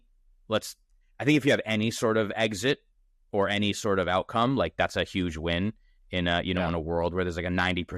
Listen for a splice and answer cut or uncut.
uncut